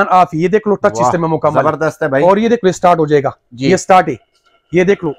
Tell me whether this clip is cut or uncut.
uncut